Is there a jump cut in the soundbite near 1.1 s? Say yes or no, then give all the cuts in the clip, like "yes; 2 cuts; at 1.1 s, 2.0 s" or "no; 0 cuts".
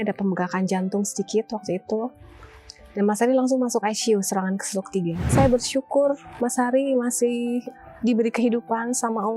no; 1 cut; at 5.3 s